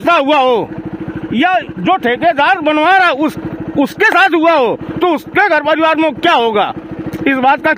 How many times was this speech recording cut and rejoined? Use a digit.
0